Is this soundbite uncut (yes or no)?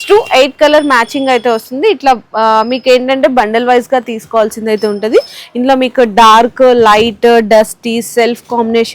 yes